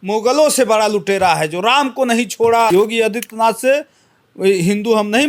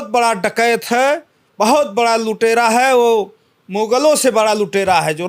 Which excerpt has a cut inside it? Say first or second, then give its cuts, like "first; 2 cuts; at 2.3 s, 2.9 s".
first; 1 cut; at 2.7 s